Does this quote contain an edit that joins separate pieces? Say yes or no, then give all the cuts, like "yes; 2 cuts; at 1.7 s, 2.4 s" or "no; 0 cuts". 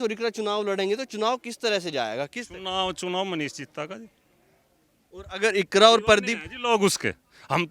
no; 0 cuts